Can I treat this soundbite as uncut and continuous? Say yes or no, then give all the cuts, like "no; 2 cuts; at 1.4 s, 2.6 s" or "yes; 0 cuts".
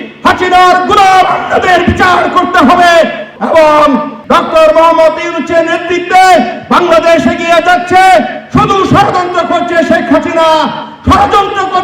no; 2 cuts; at 3.3 s, 4.1 s